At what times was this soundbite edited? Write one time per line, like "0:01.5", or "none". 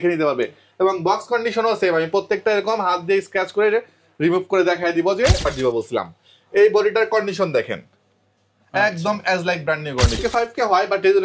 0:05.4
0:10.2